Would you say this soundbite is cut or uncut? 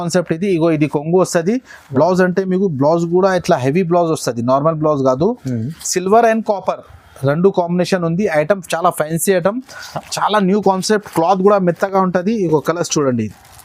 uncut